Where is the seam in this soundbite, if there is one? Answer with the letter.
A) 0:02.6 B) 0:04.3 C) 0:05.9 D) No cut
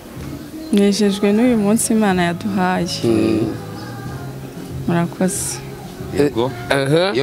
D